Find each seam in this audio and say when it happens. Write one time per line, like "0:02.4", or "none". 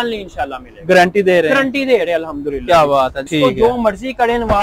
0:03.2